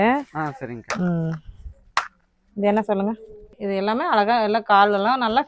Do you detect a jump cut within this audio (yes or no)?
yes